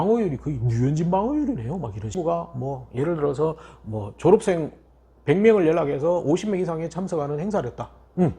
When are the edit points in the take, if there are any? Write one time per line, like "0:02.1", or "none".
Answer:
0:02.2